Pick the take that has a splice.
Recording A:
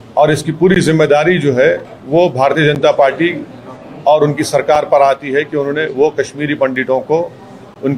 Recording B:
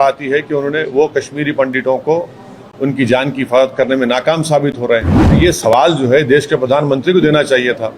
B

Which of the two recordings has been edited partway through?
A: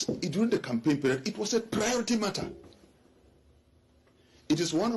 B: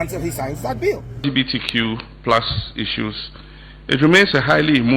B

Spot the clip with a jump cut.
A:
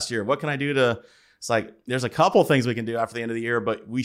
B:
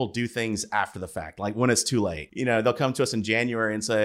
B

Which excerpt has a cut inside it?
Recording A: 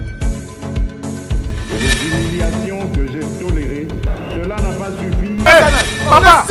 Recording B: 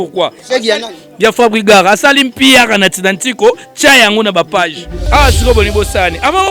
B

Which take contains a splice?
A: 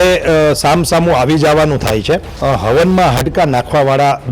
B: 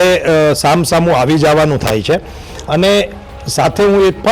A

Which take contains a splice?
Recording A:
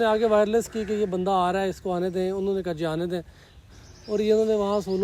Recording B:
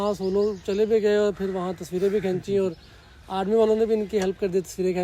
A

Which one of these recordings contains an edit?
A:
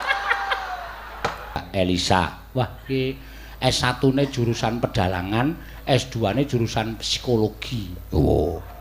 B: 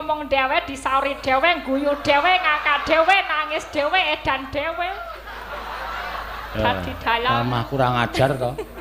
A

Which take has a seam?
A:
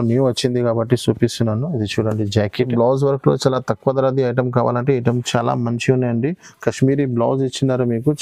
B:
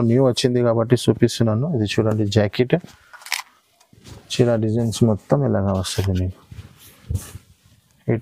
A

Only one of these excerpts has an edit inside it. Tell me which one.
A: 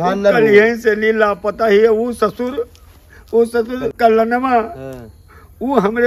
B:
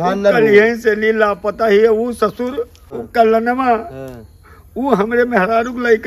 B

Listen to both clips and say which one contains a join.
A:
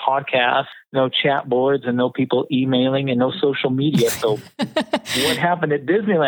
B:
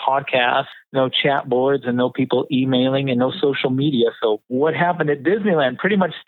B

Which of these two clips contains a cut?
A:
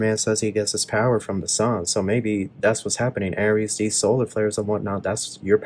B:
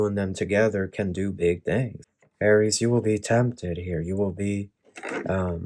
B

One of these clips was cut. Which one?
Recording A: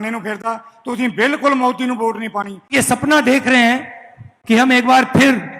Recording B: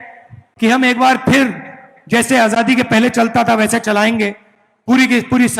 A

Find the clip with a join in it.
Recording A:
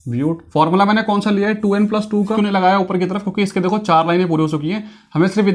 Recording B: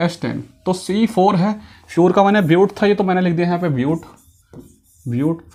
A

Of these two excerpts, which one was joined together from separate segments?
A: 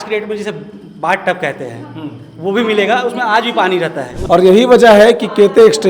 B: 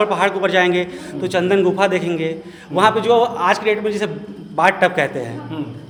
A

